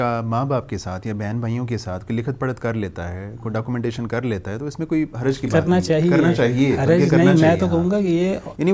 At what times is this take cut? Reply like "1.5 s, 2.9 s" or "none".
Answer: none